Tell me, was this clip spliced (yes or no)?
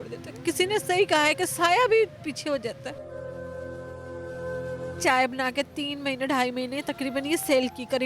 yes